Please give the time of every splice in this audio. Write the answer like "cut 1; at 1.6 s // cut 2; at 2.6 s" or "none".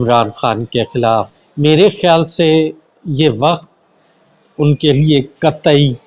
cut 1; at 1.4 s

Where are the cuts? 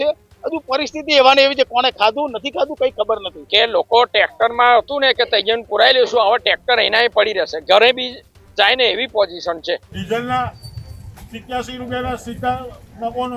cut 1; at 3.4 s // cut 2; at 9.9 s

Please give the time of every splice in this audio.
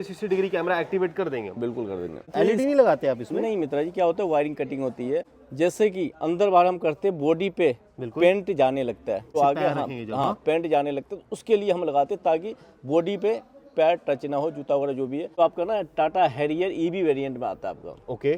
cut 1; at 2.3 s // cut 2; at 5.4 s // cut 3; at 9.3 s // cut 4; at 15.4 s

